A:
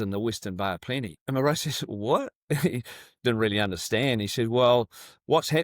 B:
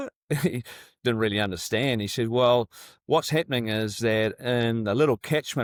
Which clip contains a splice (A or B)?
A